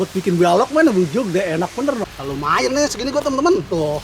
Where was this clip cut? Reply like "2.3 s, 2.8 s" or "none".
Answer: 2.0 s